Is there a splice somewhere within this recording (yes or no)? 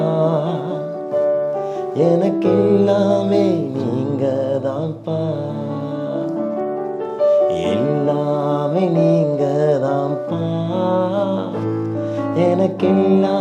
no